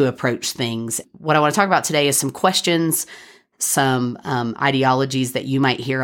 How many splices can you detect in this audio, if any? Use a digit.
1